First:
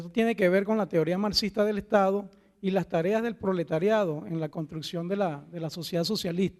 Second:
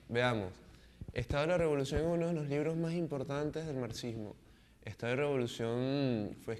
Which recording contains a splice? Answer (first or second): second